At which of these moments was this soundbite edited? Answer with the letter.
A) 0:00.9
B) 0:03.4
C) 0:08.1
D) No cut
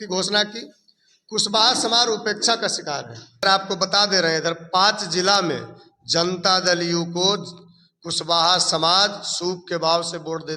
B